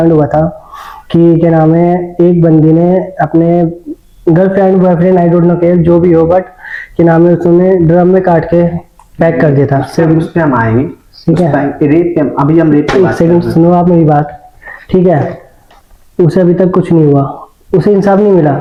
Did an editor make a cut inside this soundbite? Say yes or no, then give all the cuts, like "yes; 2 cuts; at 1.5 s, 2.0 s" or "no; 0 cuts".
no; 0 cuts